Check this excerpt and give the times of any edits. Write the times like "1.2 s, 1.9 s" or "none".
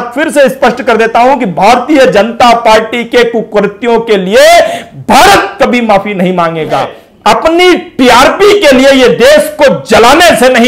7.0 s